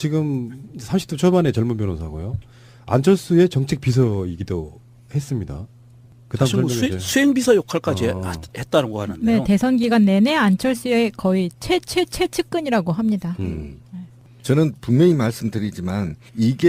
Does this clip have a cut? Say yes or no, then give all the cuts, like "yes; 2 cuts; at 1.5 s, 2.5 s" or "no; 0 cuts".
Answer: no; 0 cuts